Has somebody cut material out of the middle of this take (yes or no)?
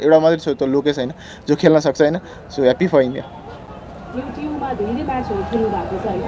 no